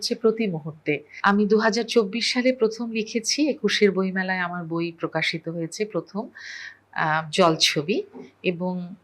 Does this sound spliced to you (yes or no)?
yes